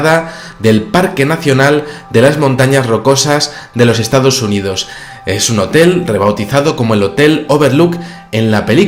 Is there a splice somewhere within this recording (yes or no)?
no